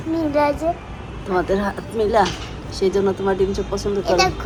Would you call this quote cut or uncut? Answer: uncut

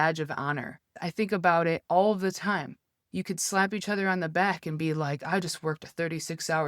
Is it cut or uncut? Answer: cut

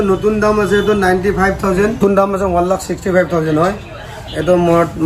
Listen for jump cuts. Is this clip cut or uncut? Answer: cut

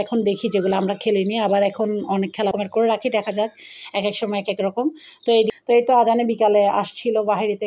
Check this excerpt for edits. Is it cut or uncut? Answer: cut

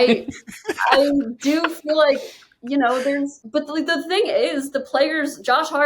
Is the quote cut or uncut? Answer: cut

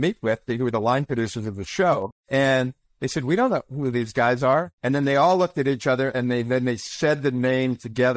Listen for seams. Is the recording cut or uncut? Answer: cut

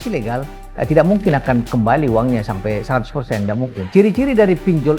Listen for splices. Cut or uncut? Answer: cut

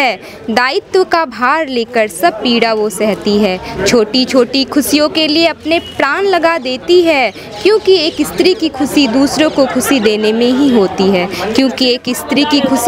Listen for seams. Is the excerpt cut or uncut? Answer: uncut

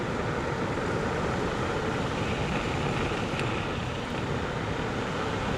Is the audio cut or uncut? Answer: uncut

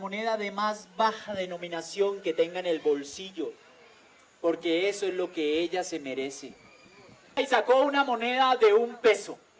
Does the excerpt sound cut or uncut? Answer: uncut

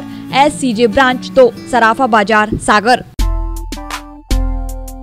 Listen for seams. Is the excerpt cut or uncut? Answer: cut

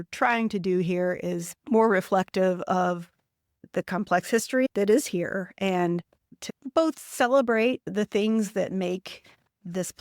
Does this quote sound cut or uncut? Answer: cut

